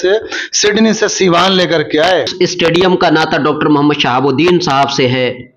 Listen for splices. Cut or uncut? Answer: cut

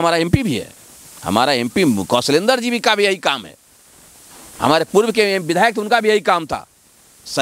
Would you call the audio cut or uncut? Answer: uncut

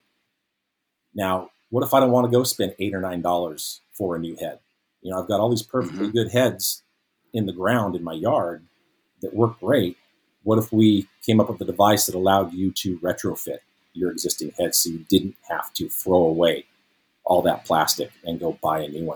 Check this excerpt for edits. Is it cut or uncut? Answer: uncut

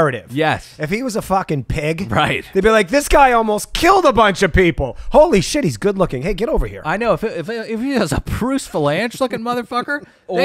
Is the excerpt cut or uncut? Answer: uncut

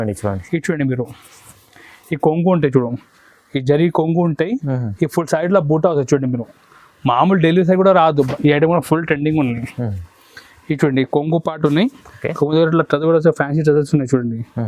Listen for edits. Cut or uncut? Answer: cut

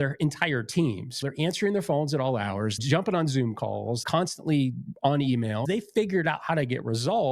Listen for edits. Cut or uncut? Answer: cut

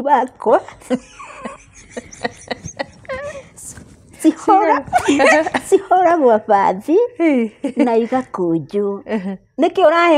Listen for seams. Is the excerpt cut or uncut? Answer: uncut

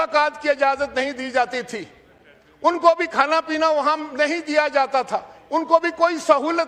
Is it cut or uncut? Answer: uncut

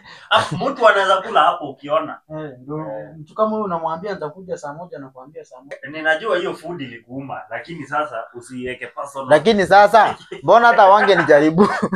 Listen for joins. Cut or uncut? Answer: cut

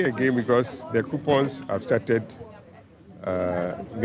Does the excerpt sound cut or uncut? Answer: uncut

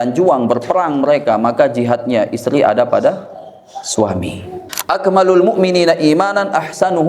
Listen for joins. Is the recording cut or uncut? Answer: cut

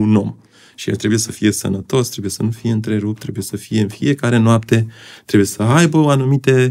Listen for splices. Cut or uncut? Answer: uncut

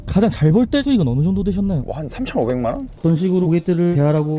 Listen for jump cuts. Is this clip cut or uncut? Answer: cut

